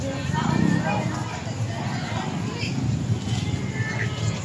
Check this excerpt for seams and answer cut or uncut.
uncut